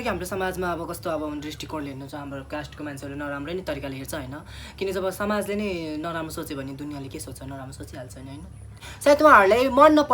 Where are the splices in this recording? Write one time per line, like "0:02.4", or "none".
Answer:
0:08.8

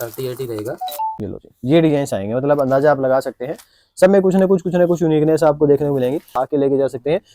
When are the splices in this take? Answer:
0:01.2
0:06.3

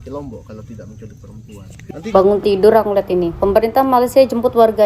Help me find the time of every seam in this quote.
0:02.1

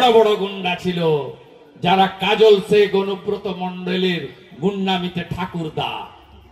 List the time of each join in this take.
none

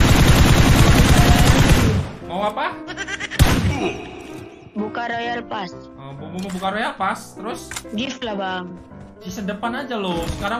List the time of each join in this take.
0:07.7

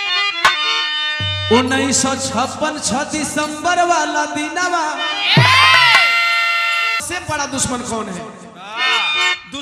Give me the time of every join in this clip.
0:07.0

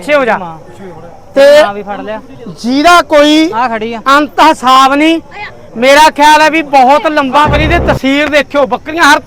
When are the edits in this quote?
0:07.5

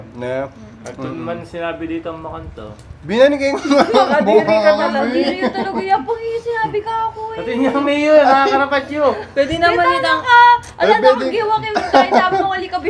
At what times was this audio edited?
none

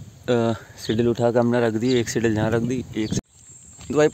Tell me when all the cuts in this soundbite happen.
0:03.2

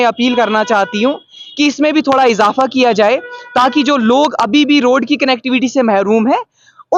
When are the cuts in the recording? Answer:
none

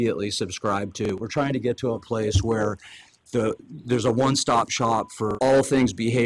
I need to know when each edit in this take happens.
0:01.0
0:05.3

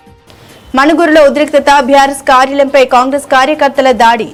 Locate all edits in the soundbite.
none

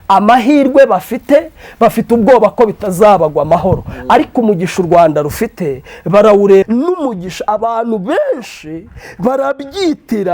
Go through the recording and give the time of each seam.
0:06.7

